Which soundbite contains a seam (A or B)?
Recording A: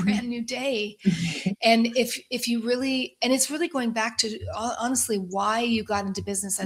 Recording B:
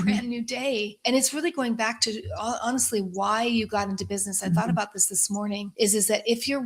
B